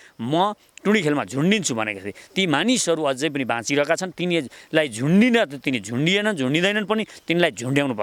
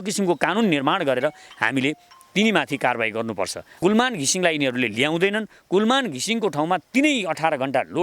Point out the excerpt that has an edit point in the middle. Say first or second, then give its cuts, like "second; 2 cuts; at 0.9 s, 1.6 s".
second; 1 cut; at 3.6 s